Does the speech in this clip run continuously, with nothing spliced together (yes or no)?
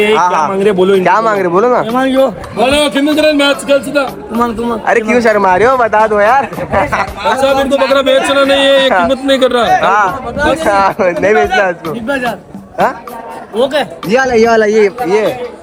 yes